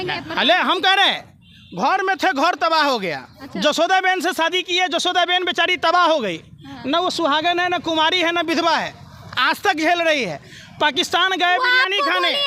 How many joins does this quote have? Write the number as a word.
zero